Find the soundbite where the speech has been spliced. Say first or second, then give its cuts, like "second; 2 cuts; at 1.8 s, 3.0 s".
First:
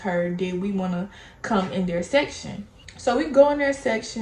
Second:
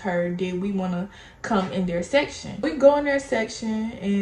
second; 1 cut; at 2.6 s